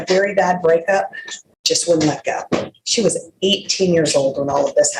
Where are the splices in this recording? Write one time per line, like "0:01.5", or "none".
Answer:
none